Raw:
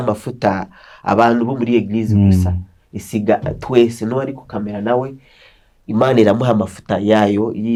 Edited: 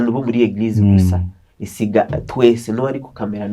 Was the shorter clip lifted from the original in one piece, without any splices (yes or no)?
yes